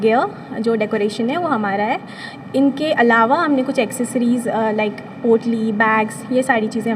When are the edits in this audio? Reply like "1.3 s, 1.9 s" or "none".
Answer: none